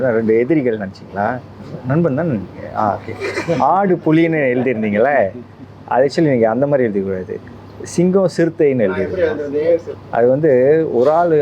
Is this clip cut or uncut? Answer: uncut